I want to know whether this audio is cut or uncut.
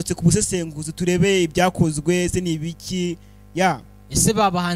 uncut